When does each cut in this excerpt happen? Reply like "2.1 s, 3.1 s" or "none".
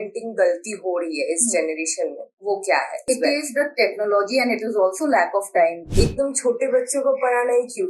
3.0 s, 5.8 s